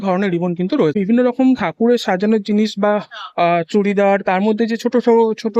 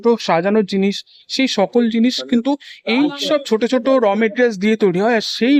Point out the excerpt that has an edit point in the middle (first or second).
first